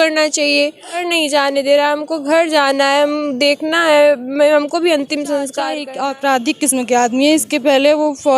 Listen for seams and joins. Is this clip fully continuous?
no; 2 cuts; at 1.0 s, 5.6 s

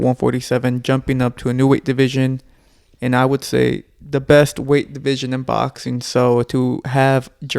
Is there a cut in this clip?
no; 0 cuts

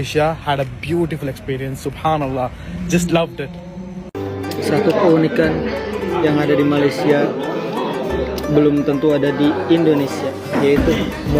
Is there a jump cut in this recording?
yes; 1 cut; at 4.1 s

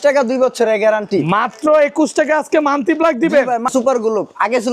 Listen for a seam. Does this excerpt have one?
yes; 1 cut; at 3.7 s

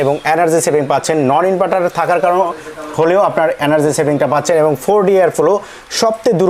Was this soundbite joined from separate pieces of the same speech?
no; 0 cuts

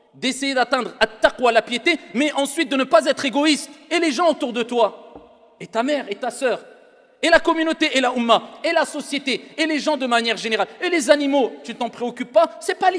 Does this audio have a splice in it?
no; 0 cuts

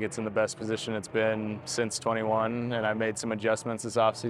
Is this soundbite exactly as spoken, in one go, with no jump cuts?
yes; 0 cuts

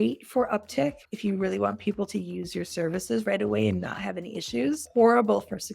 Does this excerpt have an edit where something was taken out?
yes; 2 cuts; at 1.0 s, 4.8 s

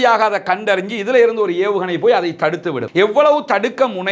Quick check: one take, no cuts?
no; 1 cut; at 2.8 s

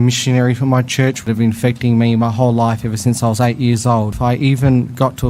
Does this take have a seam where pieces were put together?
yes; 2 cuts; at 1.2 s, 4.1 s

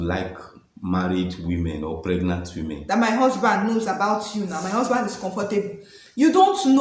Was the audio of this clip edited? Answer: yes; 1 cut; at 2.8 s

